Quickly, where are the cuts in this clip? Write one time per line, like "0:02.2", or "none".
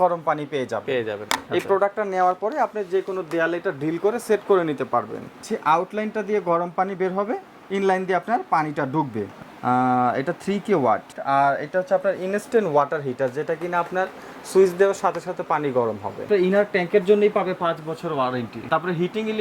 0:01.2
0:05.5
0:09.3
0:11.1
0:16.3
0:18.5